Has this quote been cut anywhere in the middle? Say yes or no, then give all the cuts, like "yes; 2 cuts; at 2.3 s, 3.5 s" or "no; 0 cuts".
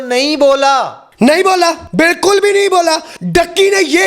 yes; 3 cuts; at 1.0 s, 1.8 s, 3.1 s